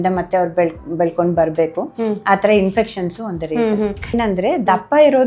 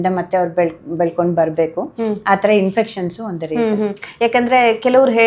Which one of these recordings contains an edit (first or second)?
first